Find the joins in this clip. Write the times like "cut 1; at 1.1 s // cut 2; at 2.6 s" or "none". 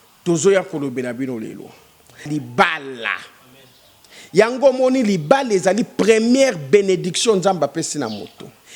cut 1; at 2.3 s